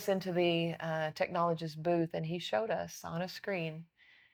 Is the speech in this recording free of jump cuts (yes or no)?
yes